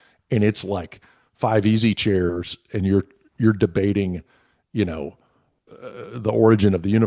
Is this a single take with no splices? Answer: yes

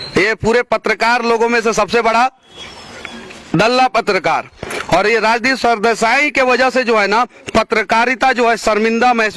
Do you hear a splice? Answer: no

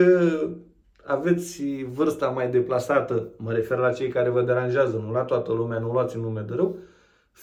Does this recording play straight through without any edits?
yes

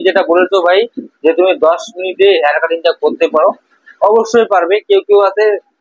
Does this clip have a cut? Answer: no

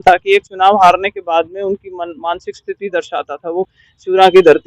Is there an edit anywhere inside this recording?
yes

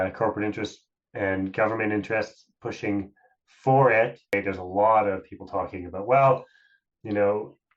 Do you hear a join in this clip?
yes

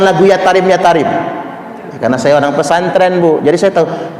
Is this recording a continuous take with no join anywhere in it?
yes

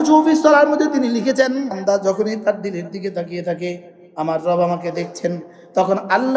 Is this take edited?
yes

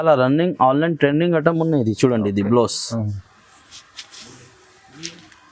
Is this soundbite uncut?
yes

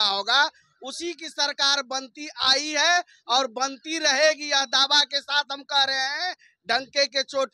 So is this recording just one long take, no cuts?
yes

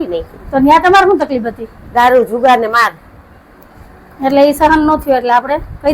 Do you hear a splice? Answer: no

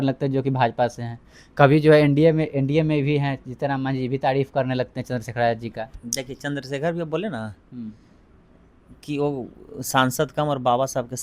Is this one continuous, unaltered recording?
yes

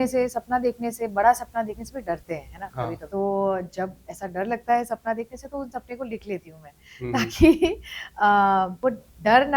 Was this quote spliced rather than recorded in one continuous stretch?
no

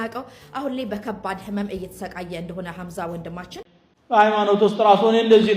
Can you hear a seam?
yes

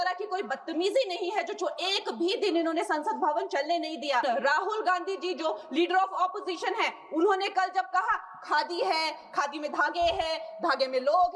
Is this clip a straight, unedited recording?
no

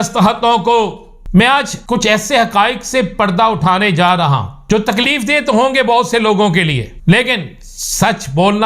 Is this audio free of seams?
no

